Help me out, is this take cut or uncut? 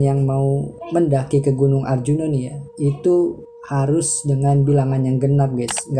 uncut